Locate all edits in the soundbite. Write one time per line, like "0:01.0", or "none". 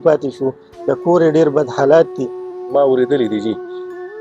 0:02.6